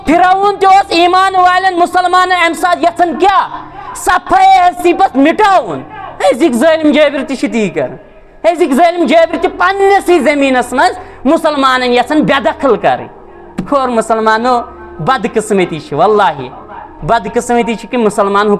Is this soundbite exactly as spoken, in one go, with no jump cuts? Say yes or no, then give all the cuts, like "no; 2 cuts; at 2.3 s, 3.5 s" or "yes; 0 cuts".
yes; 0 cuts